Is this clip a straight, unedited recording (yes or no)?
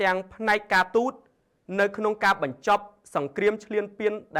yes